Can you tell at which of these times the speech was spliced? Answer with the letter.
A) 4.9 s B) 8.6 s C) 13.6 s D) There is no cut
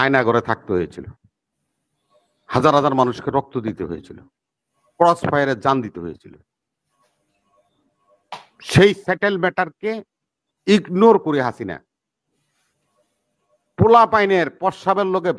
D